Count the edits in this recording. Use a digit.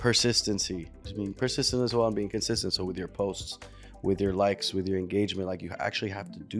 1